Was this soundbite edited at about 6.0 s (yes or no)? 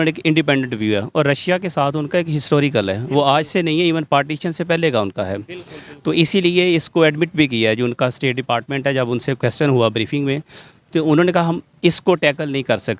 no